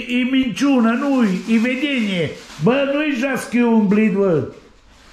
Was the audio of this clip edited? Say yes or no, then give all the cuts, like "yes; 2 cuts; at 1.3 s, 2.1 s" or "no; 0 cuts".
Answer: yes; 1 cut; at 2.4 s